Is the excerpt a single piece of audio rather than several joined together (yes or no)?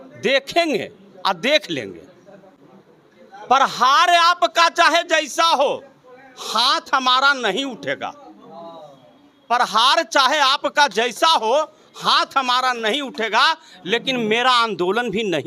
yes